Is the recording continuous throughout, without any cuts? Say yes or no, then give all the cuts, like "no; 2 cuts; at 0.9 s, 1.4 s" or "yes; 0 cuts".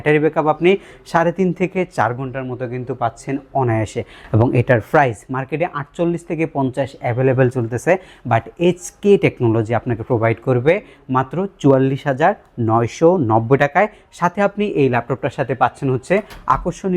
yes; 0 cuts